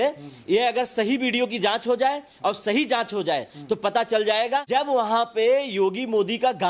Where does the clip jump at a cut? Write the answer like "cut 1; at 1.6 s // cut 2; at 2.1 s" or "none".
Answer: cut 1; at 4.9 s